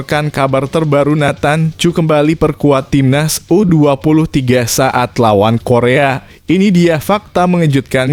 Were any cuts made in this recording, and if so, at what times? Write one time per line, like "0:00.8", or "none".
none